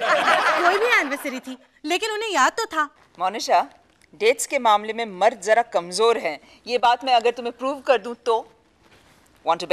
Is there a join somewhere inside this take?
no; 0 cuts

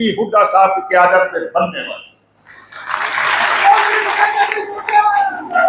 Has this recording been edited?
no; 0 cuts

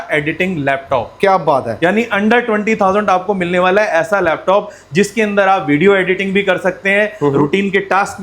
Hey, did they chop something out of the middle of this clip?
no; 0 cuts

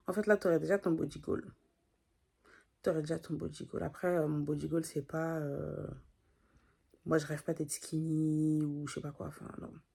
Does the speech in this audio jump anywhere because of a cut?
no; 0 cuts

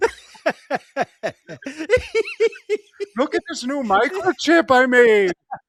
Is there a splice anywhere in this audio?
no; 0 cuts

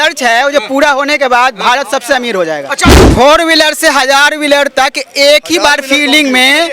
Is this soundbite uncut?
no; 1 cut; at 3.0 s

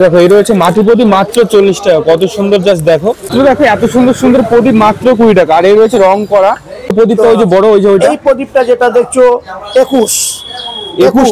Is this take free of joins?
no; 2 cuts; at 3.3 s, 6.9 s

